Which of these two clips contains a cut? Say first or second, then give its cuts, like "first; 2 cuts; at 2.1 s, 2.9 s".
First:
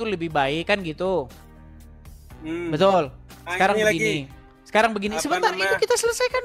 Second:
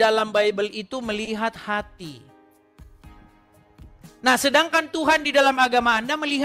second; 2 cuts; at 2.8 s, 4.2 s